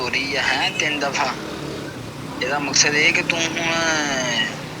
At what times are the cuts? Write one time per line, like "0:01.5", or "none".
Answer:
none